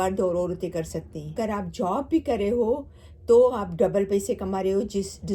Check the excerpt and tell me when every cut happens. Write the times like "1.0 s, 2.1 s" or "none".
1.3 s